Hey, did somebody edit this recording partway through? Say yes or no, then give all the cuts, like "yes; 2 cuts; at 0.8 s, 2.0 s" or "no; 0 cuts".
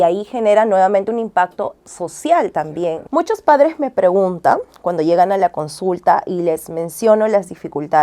yes; 1 cut; at 3.0 s